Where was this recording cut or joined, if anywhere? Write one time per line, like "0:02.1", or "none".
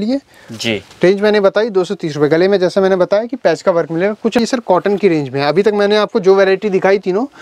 0:04.4

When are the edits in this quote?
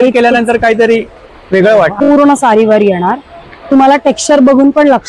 0:01.9

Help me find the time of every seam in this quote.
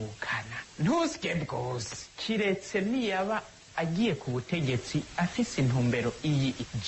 none

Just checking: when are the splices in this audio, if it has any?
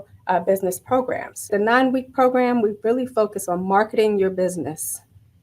0:01.5

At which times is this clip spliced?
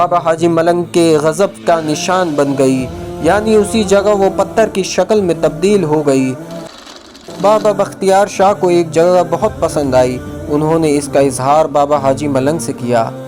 0:06.9

